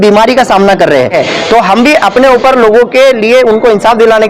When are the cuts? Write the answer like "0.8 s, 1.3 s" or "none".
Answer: 1.2 s